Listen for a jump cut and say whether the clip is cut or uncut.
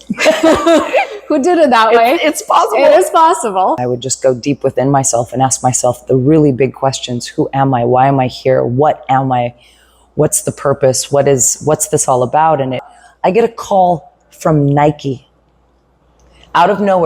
cut